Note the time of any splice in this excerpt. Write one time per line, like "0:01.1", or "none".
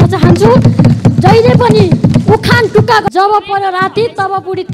0:03.0